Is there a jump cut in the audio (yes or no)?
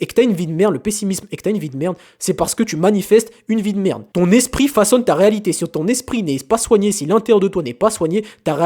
no